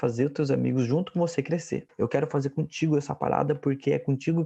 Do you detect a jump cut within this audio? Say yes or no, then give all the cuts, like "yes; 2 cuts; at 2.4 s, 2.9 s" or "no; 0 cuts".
yes; 1 cut; at 1.9 s